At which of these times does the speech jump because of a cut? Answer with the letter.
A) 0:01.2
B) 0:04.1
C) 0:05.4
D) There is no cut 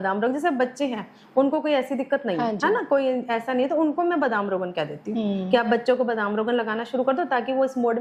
D